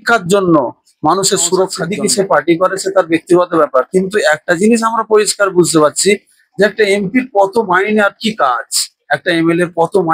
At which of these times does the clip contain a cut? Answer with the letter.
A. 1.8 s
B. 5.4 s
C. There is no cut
A